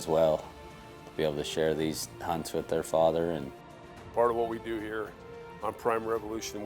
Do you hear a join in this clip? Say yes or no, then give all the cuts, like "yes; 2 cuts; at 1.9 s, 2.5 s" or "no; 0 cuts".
yes; 1 cut; at 4.1 s